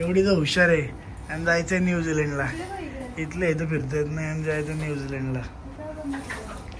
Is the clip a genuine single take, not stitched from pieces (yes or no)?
yes